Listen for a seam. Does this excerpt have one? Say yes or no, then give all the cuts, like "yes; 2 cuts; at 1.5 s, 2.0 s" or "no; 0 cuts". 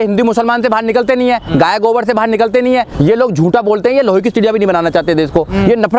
yes; 1 cut; at 2.9 s